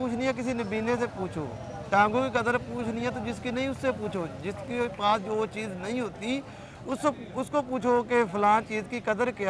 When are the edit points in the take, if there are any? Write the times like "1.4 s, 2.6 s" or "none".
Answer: none